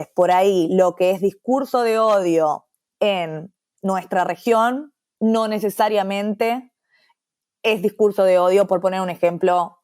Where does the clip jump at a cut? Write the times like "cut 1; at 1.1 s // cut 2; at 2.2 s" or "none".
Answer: cut 1; at 2.8 s